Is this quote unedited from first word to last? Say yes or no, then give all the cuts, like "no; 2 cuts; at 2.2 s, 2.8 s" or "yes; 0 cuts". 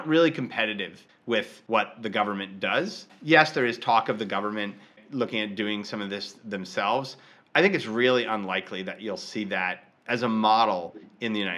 no; 3 cuts; at 1.3 s, 3.1 s, 5.0 s